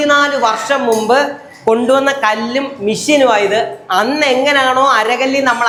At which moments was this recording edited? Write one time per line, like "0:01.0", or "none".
none